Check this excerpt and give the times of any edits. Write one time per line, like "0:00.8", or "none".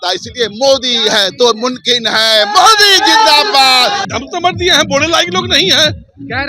0:04.0